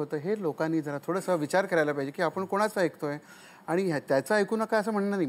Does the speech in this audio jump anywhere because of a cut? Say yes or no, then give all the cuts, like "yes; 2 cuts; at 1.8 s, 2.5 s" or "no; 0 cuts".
no; 0 cuts